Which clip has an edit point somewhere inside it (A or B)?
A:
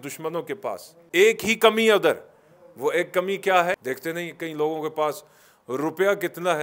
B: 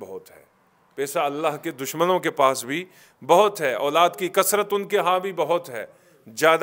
A